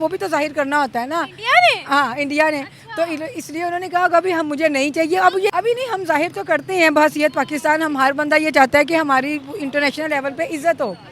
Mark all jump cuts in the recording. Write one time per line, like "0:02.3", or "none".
0:05.5